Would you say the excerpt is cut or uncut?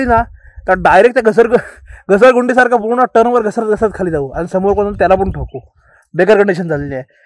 uncut